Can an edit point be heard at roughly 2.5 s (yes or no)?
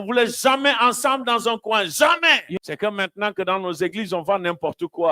yes